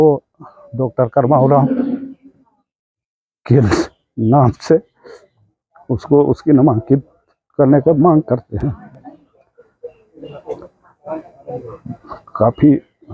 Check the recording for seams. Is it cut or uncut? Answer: uncut